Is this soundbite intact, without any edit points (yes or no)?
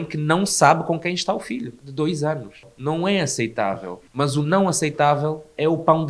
yes